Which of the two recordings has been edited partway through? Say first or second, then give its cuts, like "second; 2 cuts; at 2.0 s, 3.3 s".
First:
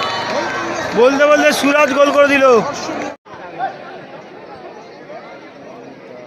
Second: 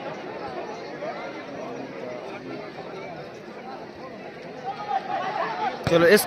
first; 1 cut; at 3.1 s